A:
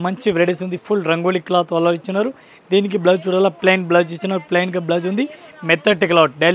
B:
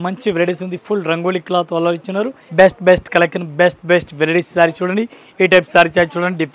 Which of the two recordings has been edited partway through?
B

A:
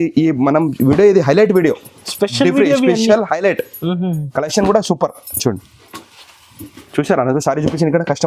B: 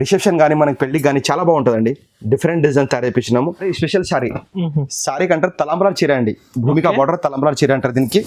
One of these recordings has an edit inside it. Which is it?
B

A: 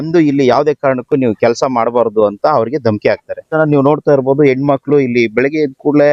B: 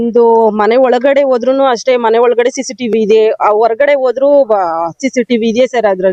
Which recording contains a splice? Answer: A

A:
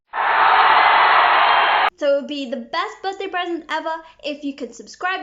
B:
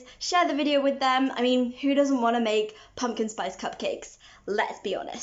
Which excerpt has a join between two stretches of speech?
A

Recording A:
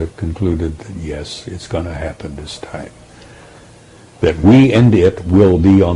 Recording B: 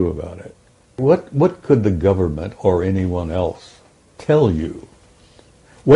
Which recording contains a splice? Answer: B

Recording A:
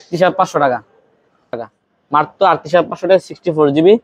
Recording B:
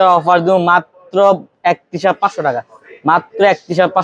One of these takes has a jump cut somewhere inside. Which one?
A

